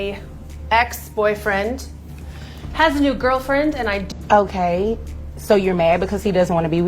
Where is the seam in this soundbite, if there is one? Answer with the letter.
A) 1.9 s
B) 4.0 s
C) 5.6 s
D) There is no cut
B